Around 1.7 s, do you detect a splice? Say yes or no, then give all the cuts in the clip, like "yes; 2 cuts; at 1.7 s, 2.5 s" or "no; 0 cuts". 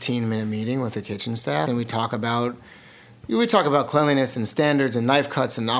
yes; 1 cut; at 1.7 s